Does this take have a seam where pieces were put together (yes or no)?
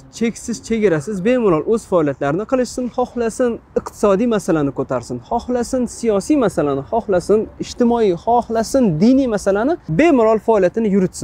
yes